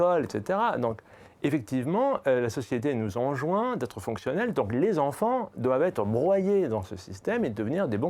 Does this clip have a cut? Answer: no; 0 cuts

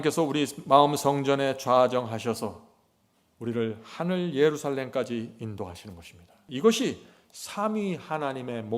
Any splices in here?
yes; 1 cut; at 6.4 s

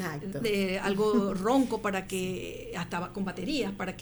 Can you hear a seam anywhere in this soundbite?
no; 0 cuts

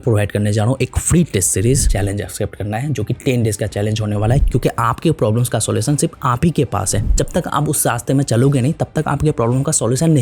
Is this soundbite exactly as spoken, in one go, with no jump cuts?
no; 3 cuts; at 1.9 s, 4.4 s, 7.1 s

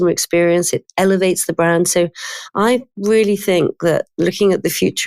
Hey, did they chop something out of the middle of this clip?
yes; 1 cut; at 2.7 s

